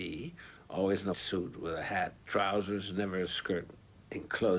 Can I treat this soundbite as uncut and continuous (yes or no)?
no